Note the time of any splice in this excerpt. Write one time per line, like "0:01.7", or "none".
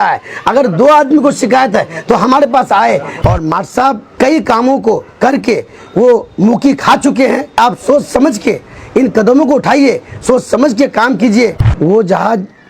0:03.1
0:04.1
0:07.6
0:11.6

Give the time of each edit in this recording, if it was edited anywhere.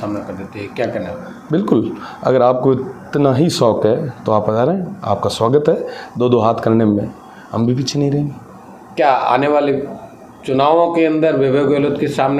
none

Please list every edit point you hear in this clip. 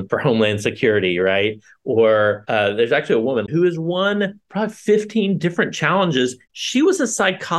0:03.5
0:06.5

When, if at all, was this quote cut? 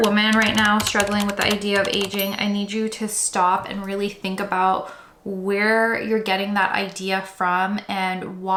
none

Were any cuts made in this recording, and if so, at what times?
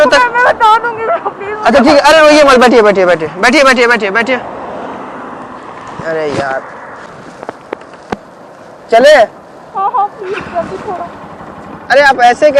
none

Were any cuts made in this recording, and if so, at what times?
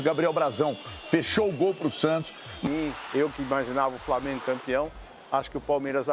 0:02.7

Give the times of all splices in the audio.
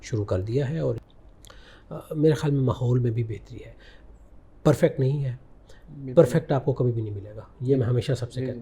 0:01.1

